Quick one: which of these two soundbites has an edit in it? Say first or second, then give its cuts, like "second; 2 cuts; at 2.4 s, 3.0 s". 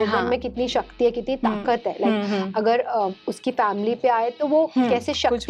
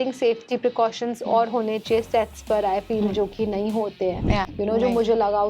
second; 1 cut; at 4.5 s